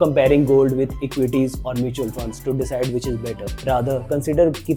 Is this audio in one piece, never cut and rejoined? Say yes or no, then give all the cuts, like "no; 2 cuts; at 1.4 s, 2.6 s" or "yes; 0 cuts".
yes; 0 cuts